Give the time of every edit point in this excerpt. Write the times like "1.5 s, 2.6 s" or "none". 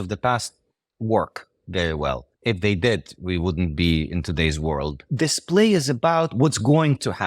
2.3 s, 5.0 s